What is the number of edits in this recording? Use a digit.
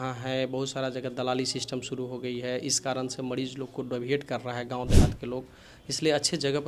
0